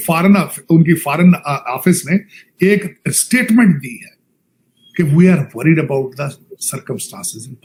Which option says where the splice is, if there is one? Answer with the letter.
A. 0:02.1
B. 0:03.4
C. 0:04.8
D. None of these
D